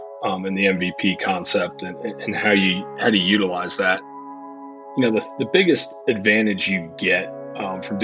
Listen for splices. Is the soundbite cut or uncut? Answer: cut